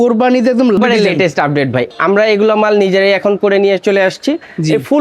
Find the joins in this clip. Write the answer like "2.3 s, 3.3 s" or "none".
0.8 s, 1.9 s